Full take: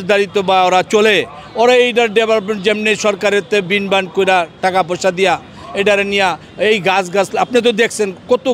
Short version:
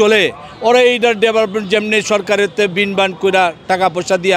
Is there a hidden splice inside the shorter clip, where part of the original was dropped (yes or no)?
no